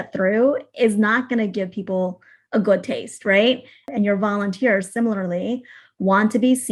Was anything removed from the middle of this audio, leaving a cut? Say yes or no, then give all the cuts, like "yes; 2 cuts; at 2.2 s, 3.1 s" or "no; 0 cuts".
yes; 1 cut; at 3.8 s